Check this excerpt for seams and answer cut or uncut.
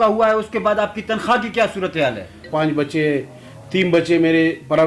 cut